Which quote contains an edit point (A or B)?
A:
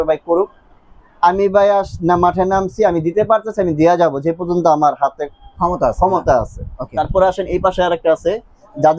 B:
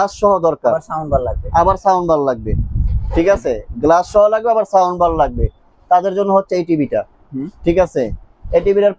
A